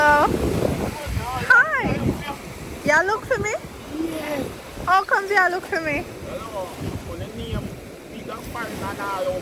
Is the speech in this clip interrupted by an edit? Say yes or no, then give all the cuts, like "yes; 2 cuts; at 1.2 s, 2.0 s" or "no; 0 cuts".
no; 0 cuts